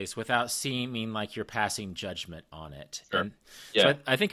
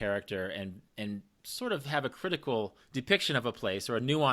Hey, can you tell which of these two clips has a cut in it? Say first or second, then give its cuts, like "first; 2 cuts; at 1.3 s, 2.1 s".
second; 2 cuts; at 1.4 s, 2.8 s